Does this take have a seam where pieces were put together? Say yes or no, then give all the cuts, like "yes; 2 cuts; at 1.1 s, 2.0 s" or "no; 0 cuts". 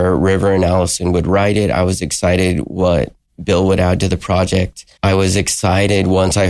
no; 0 cuts